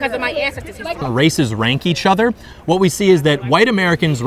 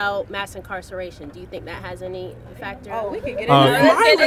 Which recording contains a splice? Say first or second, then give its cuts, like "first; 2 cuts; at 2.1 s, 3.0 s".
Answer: first; 1 cut; at 1.0 s